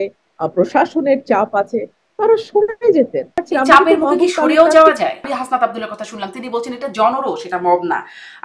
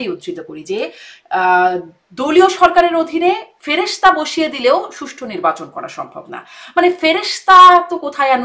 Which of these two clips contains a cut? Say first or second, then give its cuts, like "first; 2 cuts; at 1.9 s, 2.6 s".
first; 2 cuts; at 3.4 s, 5.3 s